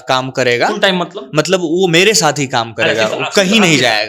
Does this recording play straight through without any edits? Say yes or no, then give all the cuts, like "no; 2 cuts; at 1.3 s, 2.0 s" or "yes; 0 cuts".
yes; 0 cuts